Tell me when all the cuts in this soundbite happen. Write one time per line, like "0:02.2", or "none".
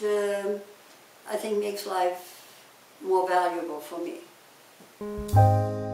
0:05.0